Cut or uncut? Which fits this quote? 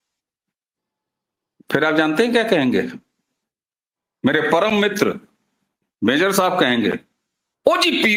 uncut